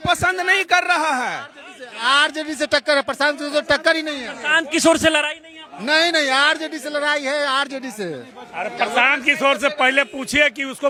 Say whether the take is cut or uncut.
uncut